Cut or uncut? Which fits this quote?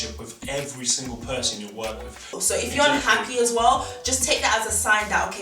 cut